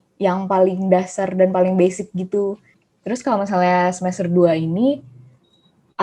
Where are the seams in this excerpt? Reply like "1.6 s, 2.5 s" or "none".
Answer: 2.7 s